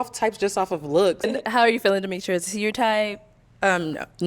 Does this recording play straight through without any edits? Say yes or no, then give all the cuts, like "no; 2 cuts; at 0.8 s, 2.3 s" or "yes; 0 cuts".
no; 1 cut; at 1.3 s